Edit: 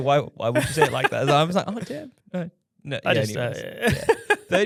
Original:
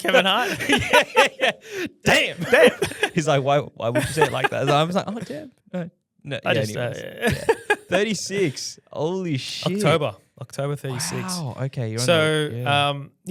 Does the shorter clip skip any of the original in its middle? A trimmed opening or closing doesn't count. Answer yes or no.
no